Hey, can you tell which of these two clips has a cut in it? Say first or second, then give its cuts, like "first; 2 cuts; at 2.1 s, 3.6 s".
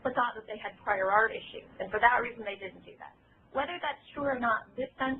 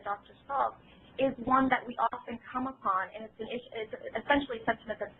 first; 1 cut; at 2.3 s